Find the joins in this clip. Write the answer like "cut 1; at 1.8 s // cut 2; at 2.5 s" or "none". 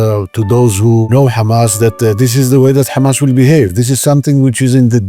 cut 1; at 1.1 s